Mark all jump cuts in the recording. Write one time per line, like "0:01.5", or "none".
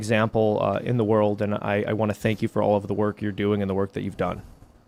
none